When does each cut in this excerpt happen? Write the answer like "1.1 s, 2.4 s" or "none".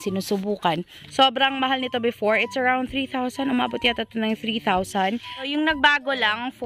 1.0 s, 5.5 s